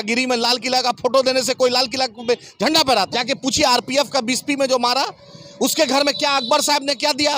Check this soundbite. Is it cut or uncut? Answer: cut